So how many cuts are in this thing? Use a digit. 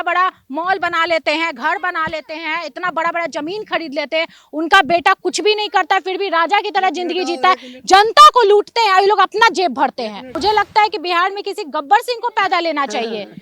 1